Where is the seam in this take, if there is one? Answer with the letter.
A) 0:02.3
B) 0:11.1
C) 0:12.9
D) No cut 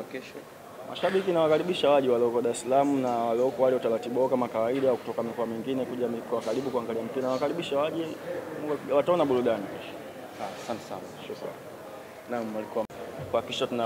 C